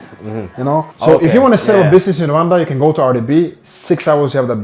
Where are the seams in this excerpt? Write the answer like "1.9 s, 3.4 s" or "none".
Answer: 0.9 s